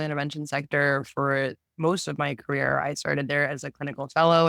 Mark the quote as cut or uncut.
uncut